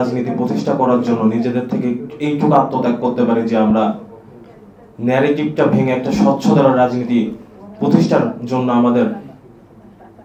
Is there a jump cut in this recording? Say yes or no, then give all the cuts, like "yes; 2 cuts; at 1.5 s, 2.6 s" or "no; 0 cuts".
no; 0 cuts